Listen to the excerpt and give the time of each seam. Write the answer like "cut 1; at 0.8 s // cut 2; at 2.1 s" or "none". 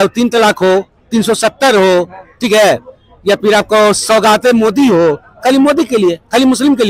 none